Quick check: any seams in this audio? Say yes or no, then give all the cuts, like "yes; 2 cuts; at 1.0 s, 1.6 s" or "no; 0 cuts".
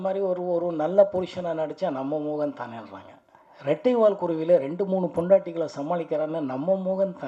no; 0 cuts